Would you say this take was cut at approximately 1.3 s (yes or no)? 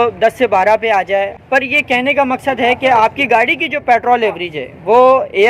yes